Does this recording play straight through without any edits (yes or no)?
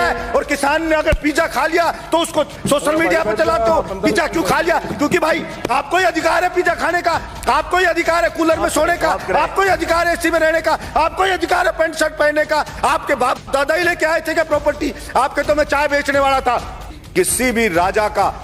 no